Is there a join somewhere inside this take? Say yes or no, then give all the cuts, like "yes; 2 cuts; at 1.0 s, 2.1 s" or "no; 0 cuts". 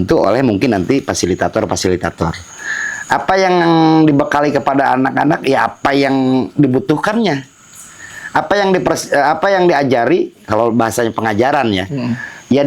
no; 0 cuts